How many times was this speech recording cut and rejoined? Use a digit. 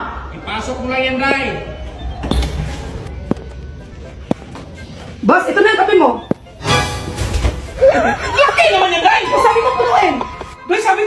0